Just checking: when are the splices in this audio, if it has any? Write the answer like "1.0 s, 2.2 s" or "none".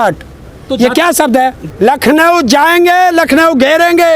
1.6 s